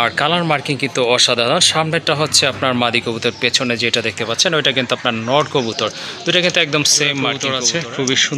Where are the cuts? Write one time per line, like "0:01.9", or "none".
0:07.4